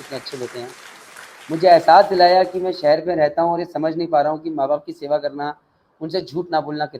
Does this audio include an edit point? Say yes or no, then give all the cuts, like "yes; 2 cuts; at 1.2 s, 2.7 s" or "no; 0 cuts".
no; 0 cuts